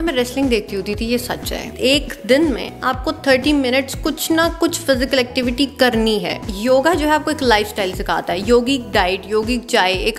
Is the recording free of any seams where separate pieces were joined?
no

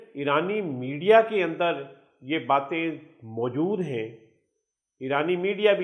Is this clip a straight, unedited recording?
yes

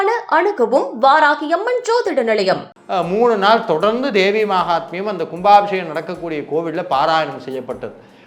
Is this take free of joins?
no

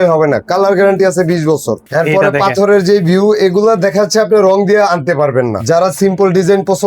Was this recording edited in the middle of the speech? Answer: yes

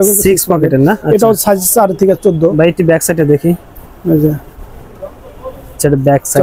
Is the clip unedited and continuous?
yes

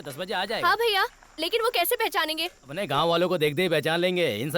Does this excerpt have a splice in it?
yes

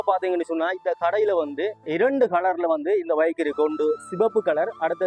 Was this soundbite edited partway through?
no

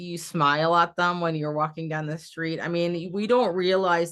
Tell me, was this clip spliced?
no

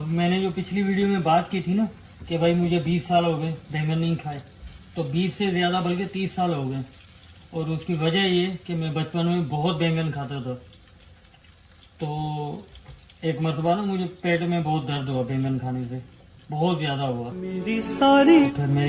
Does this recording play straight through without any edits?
yes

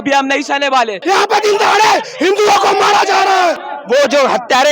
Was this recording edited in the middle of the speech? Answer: yes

